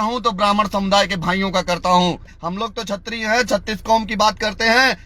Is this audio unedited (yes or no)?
no